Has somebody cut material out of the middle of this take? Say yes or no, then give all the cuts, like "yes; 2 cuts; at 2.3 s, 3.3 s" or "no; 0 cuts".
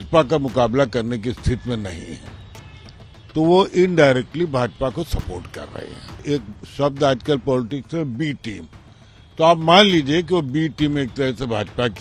yes; 1 cut; at 6.2 s